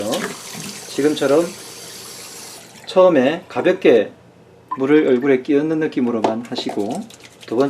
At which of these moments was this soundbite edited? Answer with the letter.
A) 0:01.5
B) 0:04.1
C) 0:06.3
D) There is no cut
A